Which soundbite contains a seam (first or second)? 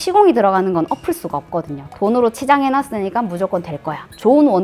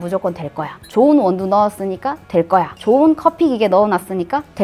first